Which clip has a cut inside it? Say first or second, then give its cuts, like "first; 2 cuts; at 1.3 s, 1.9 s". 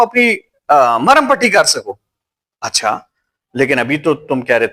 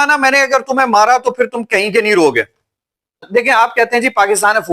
second; 1 cut; at 3.2 s